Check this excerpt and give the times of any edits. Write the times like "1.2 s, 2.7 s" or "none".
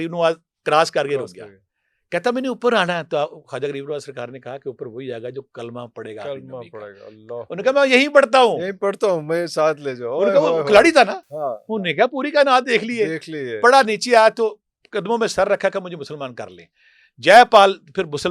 none